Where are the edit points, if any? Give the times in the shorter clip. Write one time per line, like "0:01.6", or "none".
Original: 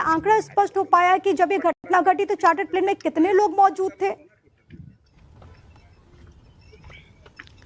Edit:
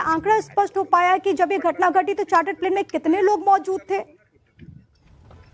0:01.8